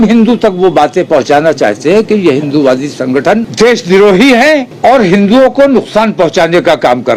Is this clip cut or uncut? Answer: cut